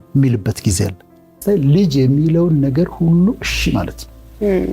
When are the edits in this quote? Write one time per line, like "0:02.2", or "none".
0:01.3